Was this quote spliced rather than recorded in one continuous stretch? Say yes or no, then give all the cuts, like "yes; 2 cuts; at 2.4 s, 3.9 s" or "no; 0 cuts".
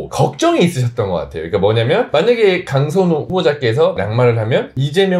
no; 0 cuts